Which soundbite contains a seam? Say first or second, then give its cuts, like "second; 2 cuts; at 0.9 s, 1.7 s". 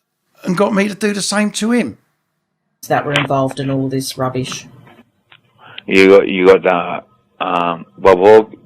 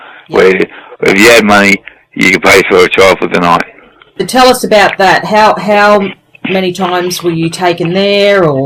first; 1 cut; at 2.8 s